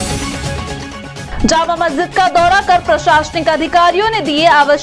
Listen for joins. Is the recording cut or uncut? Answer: uncut